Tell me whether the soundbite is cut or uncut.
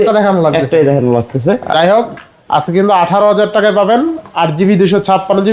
cut